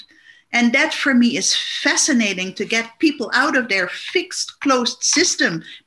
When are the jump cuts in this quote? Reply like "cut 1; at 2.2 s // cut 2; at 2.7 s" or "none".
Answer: none